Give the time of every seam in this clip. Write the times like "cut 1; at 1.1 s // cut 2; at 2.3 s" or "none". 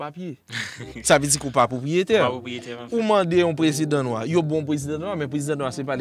none